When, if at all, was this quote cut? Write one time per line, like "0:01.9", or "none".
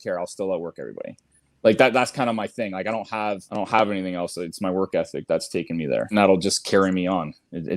0:03.5
0:06.1